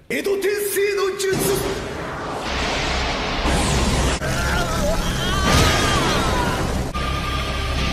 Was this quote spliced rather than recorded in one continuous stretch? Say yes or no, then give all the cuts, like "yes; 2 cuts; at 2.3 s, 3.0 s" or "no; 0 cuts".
no; 0 cuts